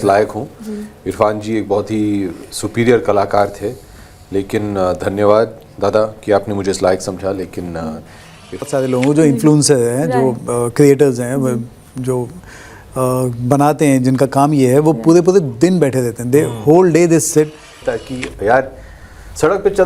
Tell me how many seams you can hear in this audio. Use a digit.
2